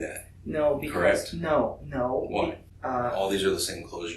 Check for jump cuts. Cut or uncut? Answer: cut